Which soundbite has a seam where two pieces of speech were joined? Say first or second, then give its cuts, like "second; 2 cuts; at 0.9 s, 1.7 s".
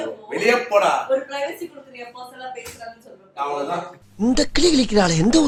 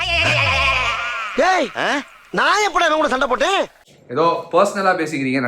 second; 1 cut; at 3.8 s